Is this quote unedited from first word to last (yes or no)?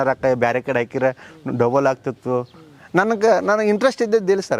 yes